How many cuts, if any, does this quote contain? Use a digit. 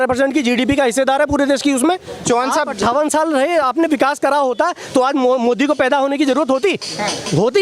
1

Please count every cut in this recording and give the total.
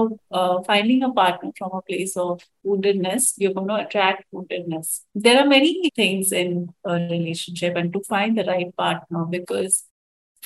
1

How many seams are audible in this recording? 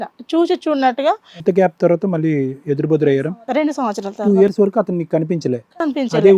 1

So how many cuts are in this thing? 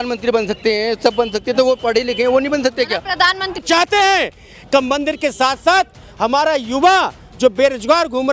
1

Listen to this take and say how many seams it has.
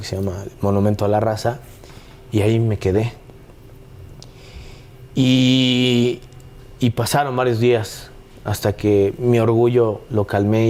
0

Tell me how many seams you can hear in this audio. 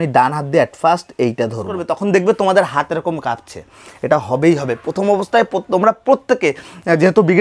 1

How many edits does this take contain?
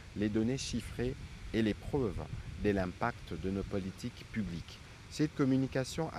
0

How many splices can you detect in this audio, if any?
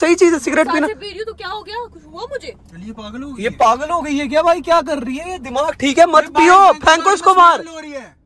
0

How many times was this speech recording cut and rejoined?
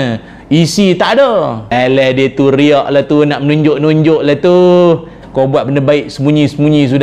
2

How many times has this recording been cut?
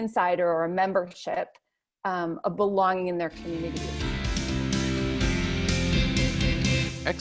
1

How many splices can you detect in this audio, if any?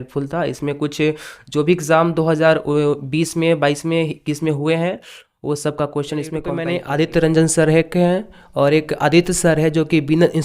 1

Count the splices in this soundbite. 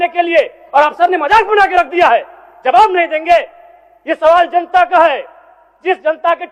0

